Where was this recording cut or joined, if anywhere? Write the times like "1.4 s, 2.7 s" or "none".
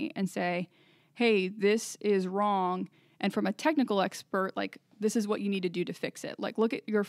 none